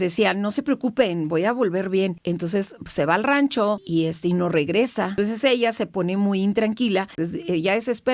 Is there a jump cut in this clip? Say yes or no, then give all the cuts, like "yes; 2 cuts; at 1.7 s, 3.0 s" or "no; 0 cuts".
yes; 4 cuts; at 2.2 s, 3.8 s, 5.1 s, 7.1 s